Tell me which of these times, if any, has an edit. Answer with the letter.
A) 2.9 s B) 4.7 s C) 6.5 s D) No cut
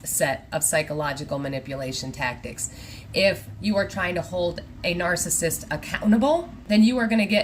C